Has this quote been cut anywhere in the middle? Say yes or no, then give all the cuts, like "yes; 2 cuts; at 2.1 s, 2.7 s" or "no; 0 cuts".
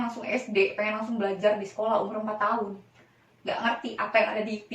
no; 0 cuts